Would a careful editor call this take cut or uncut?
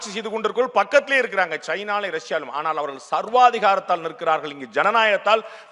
uncut